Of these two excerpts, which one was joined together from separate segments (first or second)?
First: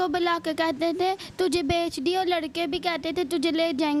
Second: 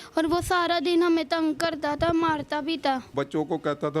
second